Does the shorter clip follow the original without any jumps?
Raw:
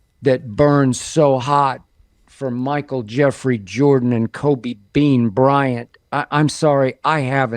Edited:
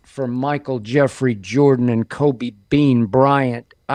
yes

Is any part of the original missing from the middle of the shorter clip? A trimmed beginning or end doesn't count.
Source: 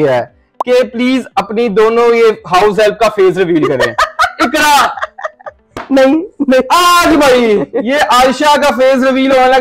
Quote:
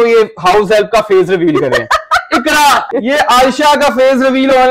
yes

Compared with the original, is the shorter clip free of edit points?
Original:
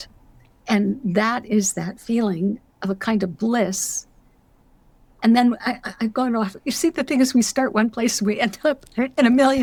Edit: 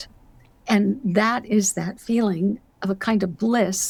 yes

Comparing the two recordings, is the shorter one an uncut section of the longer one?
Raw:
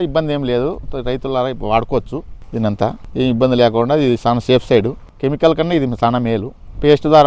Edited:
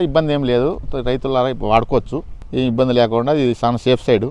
no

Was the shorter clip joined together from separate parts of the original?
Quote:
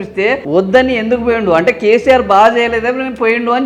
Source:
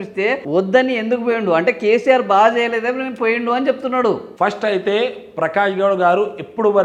no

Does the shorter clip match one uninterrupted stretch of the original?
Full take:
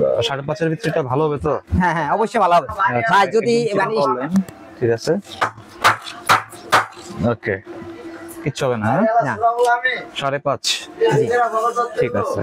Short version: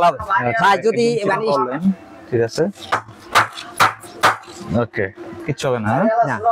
no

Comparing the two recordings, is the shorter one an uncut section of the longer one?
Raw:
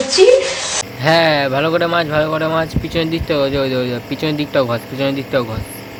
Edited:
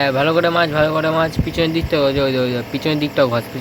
yes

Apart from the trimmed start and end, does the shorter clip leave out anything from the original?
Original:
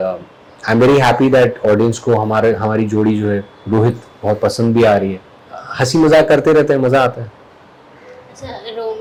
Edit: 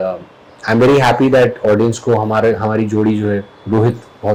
no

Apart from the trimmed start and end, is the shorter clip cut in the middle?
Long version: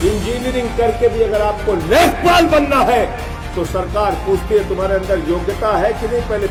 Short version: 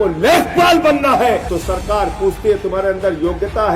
yes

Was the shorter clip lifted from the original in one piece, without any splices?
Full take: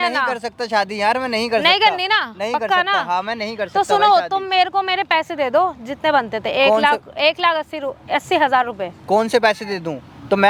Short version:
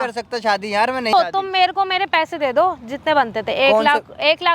no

